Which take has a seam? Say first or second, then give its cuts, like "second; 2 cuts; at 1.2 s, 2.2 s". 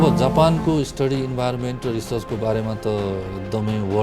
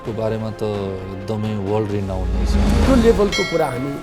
second; 1 cut; at 2.7 s